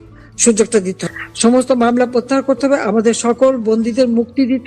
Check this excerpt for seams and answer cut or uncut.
cut